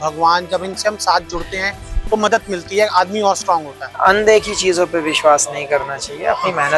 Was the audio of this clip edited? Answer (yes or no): yes